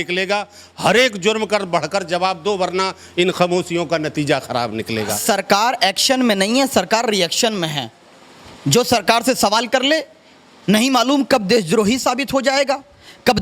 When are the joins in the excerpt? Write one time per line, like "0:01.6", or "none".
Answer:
0:05.2